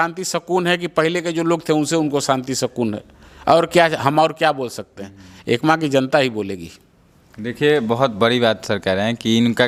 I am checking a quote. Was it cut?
no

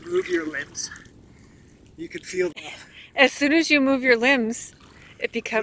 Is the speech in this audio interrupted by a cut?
no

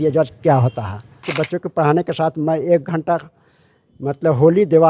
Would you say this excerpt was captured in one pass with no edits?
no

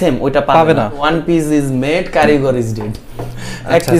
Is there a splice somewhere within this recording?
yes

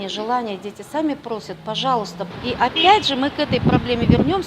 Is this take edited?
yes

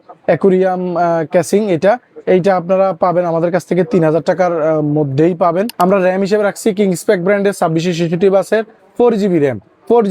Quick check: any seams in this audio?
yes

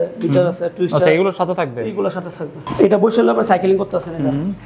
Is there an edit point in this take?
yes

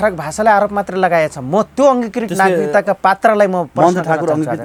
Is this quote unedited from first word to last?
yes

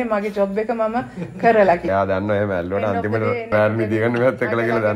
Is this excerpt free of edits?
no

